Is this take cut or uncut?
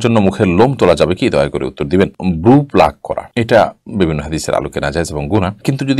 uncut